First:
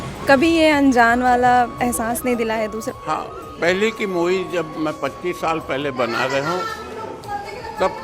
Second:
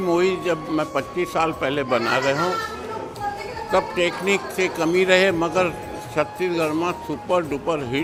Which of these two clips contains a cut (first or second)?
first